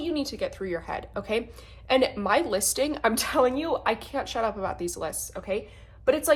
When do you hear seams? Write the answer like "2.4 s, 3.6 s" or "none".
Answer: none